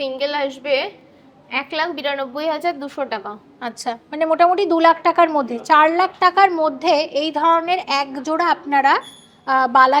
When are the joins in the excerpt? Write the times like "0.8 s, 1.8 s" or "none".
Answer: none